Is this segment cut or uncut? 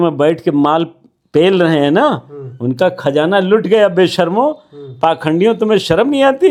uncut